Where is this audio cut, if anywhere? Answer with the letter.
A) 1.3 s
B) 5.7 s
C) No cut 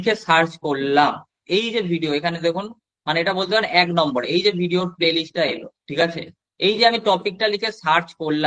A